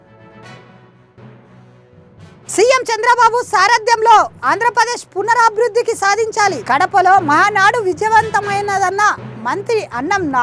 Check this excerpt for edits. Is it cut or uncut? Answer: cut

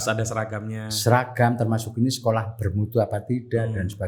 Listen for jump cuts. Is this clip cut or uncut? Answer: uncut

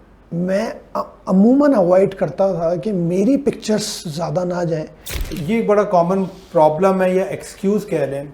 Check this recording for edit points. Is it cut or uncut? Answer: cut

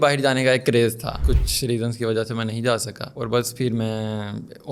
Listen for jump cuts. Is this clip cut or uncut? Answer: cut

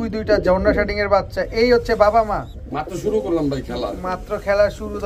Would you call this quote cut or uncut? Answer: uncut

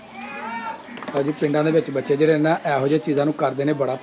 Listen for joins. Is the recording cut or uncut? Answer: uncut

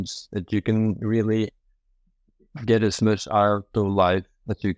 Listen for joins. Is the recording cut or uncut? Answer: uncut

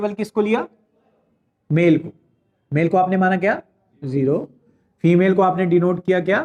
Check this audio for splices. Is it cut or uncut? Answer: uncut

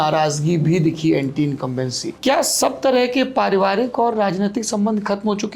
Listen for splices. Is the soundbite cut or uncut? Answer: cut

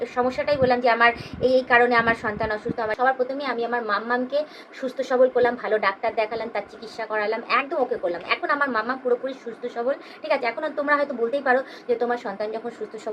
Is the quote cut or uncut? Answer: cut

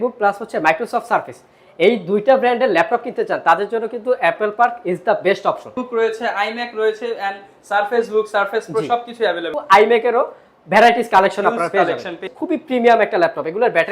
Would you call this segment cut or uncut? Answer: cut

